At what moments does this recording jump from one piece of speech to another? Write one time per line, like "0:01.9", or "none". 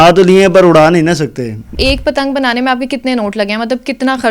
0:01.8